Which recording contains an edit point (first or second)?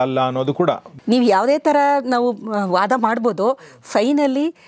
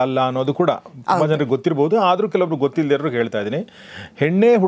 first